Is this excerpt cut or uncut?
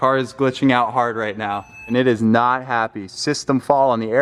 cut